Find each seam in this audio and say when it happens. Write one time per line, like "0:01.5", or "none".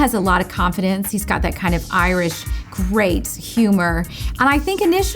0:04.2

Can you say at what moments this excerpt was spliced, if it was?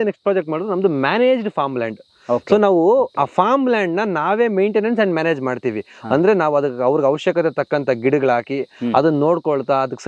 none

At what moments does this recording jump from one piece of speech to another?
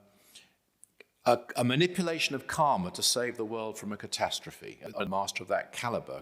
0:05.0

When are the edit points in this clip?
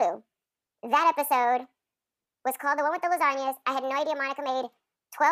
none

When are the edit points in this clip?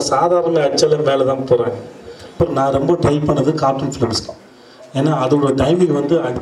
0:02.4

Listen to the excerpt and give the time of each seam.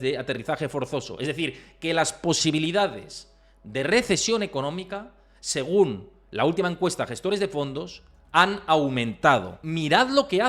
0:09.6

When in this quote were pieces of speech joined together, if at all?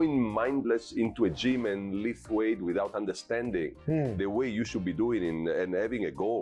none

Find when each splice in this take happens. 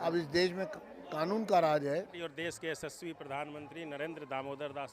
0:02.2

